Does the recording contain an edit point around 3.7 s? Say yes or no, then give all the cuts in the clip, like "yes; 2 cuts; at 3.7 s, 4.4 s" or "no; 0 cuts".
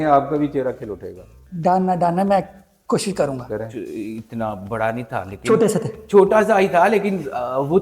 yes; 1 cut; at 3.7 s